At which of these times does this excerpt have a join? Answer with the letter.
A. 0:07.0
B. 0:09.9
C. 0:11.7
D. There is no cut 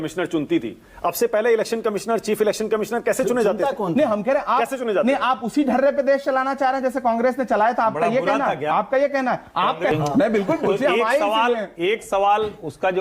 B